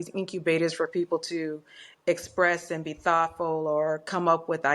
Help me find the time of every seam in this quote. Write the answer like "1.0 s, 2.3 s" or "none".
none